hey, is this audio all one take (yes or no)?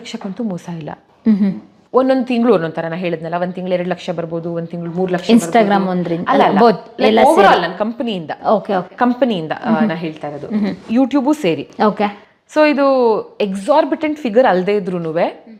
yes